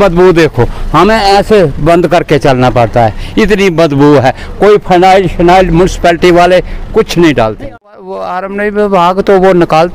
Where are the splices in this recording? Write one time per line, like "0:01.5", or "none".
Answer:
0:08.0